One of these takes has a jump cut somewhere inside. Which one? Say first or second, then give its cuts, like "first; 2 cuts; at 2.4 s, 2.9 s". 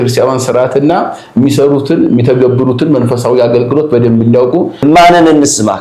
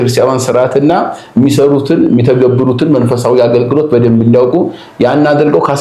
first; 1 cut; at 4.7 s